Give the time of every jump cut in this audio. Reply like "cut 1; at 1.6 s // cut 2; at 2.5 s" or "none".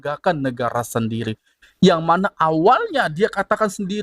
cut 1; at 1.6 s